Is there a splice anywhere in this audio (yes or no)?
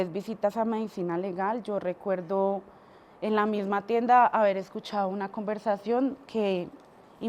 no